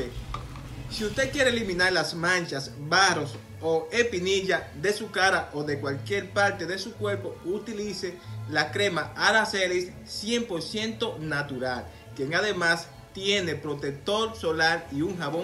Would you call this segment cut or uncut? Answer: uncut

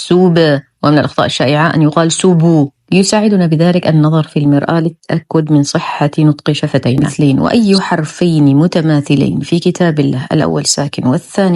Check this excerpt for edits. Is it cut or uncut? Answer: cut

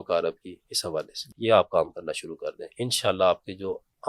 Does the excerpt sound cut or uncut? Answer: cut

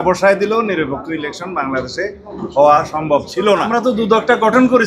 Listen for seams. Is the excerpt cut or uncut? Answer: cut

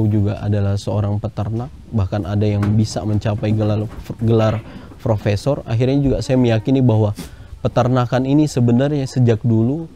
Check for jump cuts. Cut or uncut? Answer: uncut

